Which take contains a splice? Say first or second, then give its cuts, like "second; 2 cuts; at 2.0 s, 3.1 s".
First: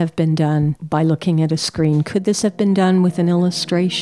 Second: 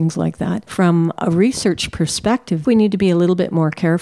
second; 1 cut; at 2.6 s